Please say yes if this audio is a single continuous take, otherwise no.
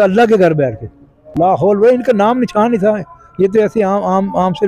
no